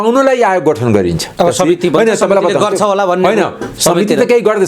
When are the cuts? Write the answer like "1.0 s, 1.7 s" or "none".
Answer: 1.2 s